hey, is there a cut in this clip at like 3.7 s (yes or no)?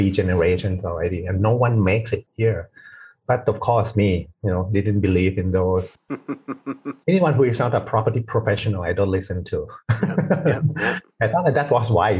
no